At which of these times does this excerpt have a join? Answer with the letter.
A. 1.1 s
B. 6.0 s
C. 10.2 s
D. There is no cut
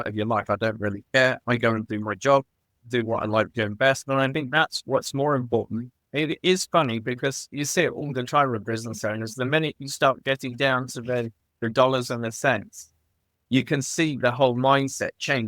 B